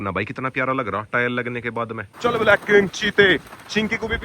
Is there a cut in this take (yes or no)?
yes